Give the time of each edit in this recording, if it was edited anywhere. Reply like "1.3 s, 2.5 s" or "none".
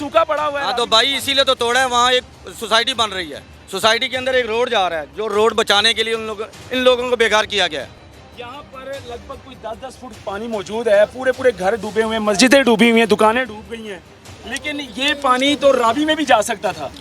none